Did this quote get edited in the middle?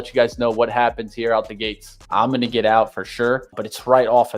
yes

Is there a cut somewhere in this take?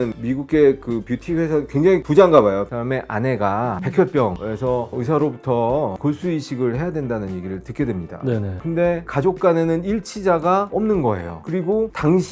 no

